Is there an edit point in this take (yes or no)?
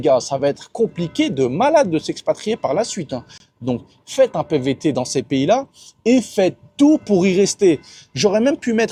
no